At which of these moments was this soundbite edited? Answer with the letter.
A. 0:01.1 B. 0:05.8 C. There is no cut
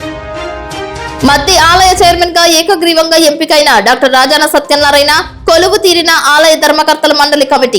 A